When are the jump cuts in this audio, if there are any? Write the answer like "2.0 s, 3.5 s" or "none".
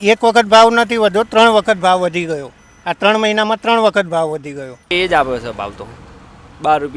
4.9 s